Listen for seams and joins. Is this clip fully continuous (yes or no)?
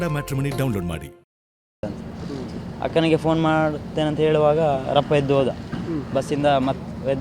no